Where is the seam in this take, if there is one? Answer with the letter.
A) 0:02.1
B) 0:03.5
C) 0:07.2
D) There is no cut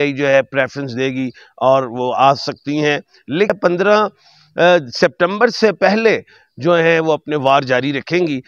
B